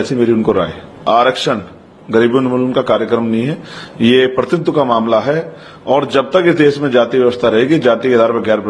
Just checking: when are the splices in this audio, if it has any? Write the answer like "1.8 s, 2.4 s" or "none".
1.0 s

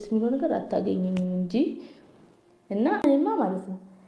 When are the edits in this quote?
3.0 s

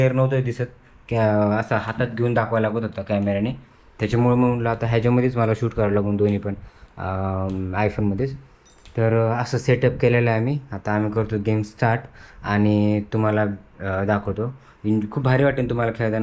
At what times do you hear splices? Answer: none

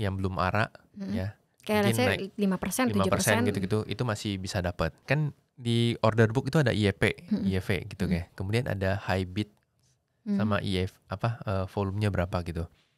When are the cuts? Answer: 5.0 s

